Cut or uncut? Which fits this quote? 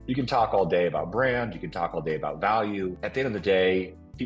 cut